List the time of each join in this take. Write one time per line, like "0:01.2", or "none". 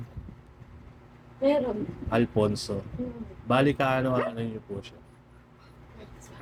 none